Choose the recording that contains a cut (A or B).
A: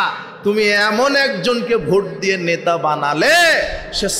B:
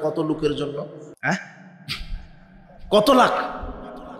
B